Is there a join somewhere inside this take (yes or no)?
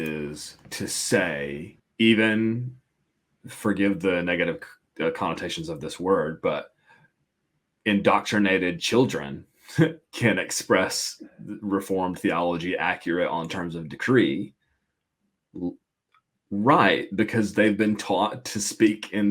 yes